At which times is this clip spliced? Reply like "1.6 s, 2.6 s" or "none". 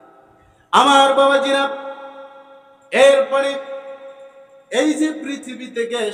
none